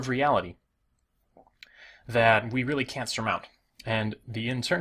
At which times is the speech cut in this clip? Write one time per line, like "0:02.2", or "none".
0:03.7